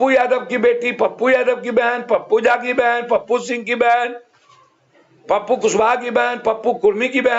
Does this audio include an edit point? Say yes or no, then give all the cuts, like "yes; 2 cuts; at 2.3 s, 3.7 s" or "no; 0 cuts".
no; 0 cuts